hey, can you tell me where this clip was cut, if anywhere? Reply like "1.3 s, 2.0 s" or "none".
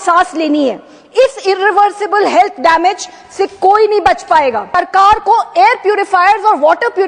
4.8 s